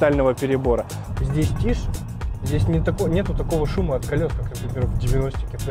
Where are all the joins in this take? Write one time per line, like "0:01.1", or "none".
0:01.0